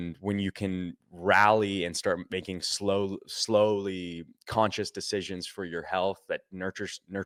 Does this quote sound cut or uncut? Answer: uncut